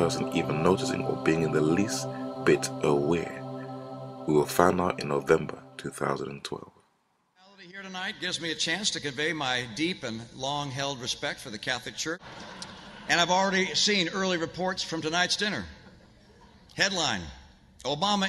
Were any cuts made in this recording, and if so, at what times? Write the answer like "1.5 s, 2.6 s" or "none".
3.2 s